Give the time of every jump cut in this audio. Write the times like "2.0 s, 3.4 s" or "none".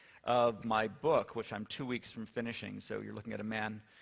none